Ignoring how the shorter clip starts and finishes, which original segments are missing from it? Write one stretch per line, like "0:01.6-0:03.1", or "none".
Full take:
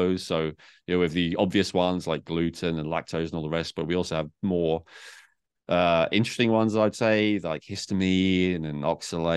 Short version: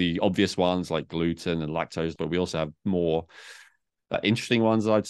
0:03.3-0:03.7
0:05.7-0:06.0